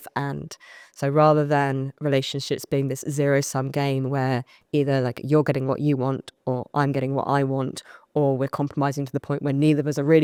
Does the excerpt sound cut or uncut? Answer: uncut